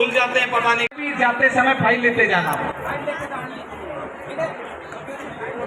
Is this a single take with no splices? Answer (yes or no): no